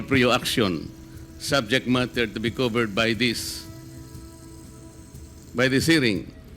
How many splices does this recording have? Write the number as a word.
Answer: two